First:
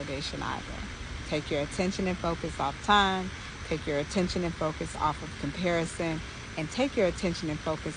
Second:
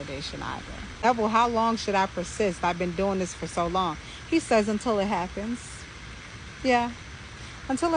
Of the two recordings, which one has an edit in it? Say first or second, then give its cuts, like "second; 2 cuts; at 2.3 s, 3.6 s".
second; 1 cut; at 1.0 s